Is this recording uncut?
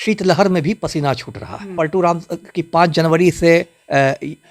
no; 1 cut; at 1.7 s

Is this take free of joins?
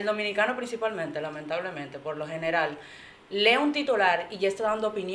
yes; 0 cuts

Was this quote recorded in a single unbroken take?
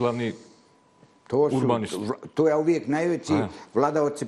yes; 0 cuts

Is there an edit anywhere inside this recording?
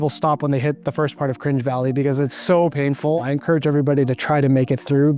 yes; 2 cuts; at 0.8 s, 3.2 s

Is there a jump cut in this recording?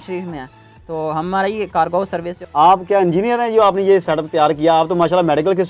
yes; 1 cut; at 2.3 s

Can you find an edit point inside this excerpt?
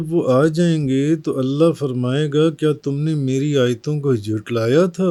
no; 0 cuts

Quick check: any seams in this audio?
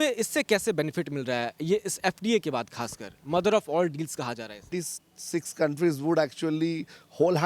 yes; 1 cut; at 4.7 s

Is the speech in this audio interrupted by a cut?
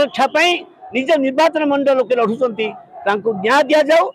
no; 0 cuts

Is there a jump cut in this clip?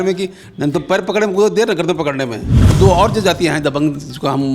yes; 1 cut; at 2.6 s

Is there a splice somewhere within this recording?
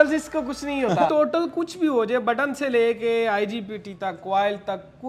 yes; 1 cut; at 1.1 s

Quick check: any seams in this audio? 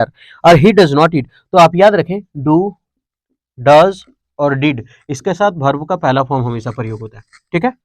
no; 0 cuts

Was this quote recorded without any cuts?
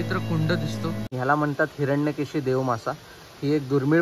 no; 1 cut; at 1.1 s

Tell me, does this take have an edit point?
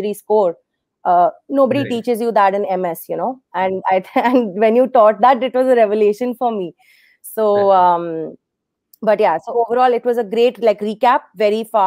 no; 0 cuts

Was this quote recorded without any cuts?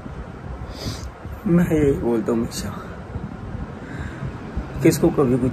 yes; 0 cuts

